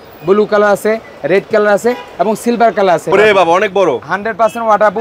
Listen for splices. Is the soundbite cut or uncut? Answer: cut